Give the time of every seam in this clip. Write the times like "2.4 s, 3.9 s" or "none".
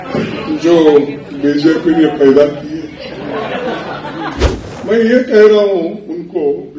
4.5 s

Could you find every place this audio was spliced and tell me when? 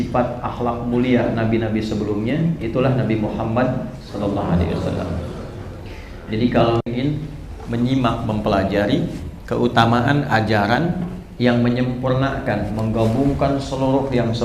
none

